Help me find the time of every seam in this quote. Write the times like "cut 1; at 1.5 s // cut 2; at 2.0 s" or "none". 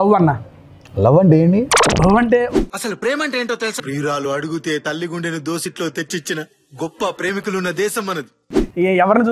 cut 1; at 2.5 s